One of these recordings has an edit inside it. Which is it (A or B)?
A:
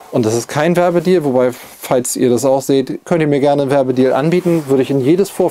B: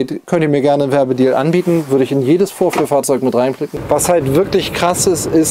B